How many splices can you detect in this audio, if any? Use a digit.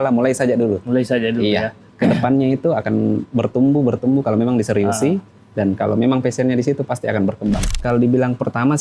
2